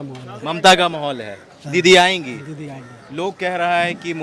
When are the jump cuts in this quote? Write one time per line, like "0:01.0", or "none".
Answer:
none